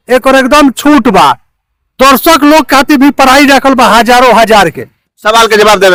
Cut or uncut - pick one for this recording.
uncut